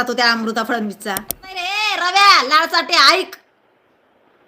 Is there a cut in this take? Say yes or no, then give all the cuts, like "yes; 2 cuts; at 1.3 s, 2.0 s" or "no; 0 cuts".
yes; 1 cut; at 1.9 s